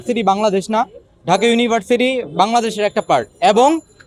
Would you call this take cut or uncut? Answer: uncut